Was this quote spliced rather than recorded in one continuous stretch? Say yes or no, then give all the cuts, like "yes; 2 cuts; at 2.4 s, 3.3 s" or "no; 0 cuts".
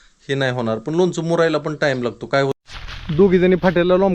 yes; 1 cut; at 2.2 s